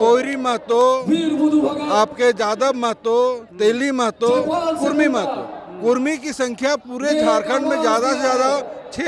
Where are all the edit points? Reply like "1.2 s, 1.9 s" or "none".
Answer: none